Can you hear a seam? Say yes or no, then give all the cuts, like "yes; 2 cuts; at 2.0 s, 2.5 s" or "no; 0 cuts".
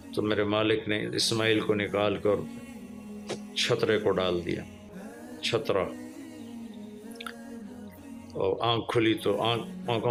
no; 0 cuts